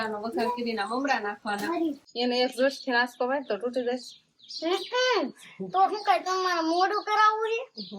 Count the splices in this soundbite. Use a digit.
1